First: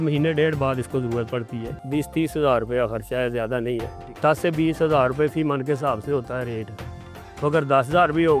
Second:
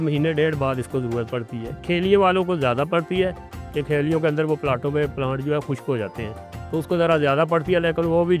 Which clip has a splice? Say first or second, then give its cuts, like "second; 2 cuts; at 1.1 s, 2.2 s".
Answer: first; 2 cuts; at 1.7 s, 4.0 s